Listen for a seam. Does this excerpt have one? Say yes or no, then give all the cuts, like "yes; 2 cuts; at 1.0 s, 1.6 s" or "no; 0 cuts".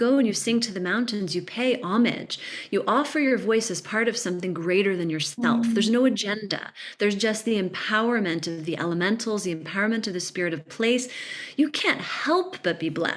no; 0 cuts